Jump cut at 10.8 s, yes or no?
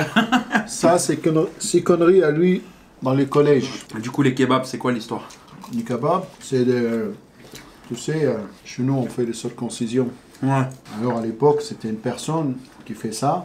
no